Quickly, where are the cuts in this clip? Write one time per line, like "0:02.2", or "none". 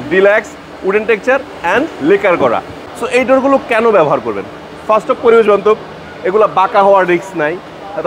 0:02.8